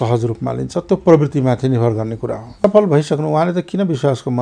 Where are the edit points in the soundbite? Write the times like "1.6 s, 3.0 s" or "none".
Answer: 2.6 s